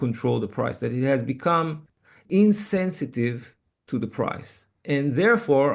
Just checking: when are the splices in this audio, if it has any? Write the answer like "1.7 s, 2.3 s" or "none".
2.2 s